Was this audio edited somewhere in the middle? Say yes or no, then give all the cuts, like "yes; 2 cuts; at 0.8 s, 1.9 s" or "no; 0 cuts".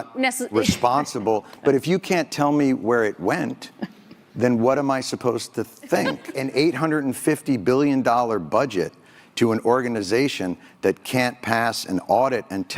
yes; 1 cut; at 6.3 s